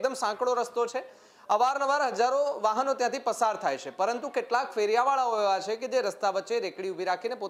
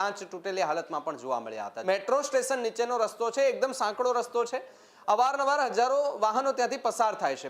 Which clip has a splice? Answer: second; 1 cut; at 1.7 s

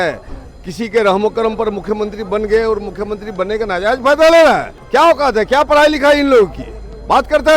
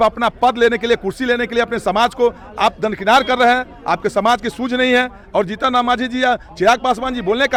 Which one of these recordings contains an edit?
first; 1 cut; at 4.7 s

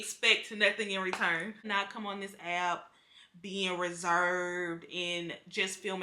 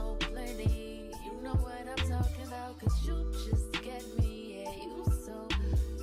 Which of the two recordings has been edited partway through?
first; 1 cut; at 1.6 s

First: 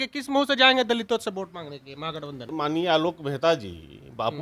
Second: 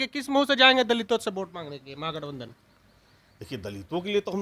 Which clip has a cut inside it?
first; 1 cut; at 2.5 s

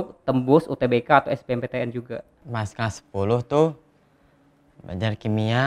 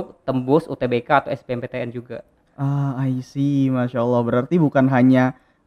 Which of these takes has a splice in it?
first; 1 cut; at 2.4 s

